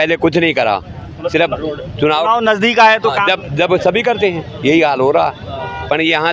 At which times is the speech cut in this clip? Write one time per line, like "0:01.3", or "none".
none